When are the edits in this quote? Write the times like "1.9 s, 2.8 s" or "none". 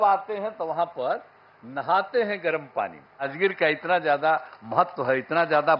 3.3 s